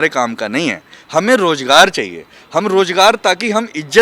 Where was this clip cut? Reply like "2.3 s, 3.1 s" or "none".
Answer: none